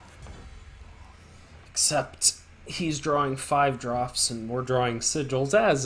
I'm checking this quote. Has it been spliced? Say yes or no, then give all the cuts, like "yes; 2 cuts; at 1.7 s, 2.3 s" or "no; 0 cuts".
no; 0 cuts